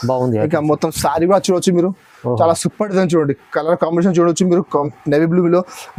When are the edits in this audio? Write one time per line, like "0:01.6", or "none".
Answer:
none